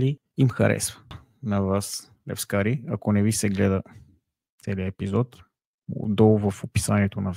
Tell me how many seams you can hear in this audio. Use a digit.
1